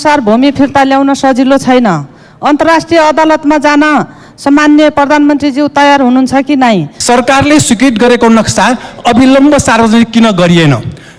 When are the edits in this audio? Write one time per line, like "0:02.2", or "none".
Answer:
0:06.9